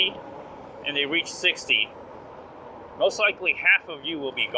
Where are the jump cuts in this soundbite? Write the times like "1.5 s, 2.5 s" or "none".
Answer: none